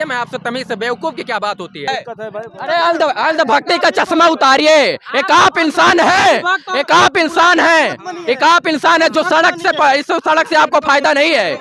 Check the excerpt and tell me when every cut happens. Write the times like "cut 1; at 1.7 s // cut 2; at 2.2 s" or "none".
cut 1; at 1.8 s